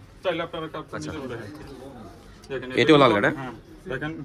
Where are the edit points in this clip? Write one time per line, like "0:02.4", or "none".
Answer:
0:01.1